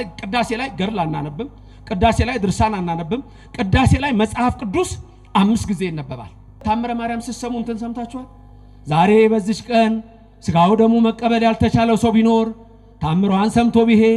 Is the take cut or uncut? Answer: cut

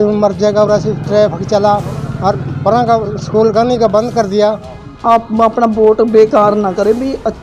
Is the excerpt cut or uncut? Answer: cut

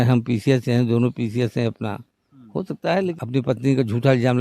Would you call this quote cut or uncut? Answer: cut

